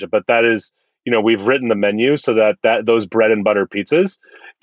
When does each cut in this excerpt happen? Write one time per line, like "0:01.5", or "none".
none